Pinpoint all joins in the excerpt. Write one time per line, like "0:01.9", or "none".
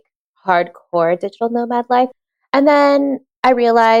0:02.1